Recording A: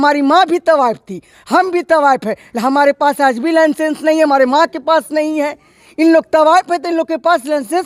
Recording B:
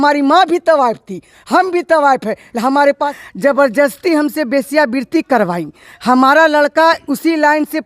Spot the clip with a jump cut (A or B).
B